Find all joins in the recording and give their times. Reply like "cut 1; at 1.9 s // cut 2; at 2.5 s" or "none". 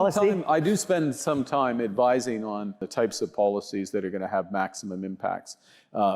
cut 1; at 2.8 s